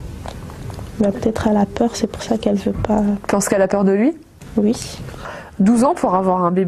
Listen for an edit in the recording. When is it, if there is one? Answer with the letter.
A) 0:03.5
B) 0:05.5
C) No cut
A